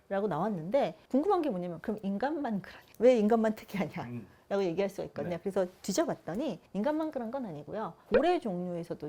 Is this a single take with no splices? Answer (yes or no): yes